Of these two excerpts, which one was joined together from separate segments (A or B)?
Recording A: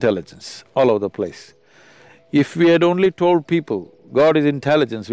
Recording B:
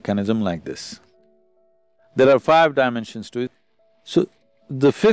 B